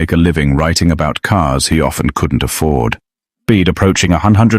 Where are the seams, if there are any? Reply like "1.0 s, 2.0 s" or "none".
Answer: 3.4 s